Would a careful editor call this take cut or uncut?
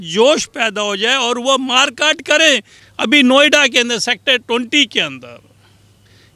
cut